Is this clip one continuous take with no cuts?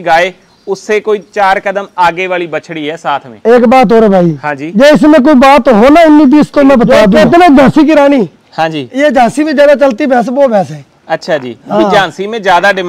no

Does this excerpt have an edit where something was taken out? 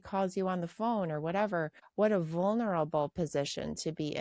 yes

